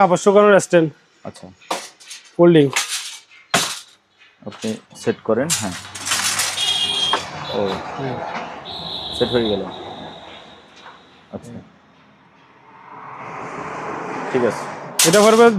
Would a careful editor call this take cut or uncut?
uncut